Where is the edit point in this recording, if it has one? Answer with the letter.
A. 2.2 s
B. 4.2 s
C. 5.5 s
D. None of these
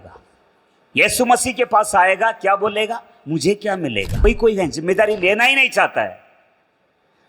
B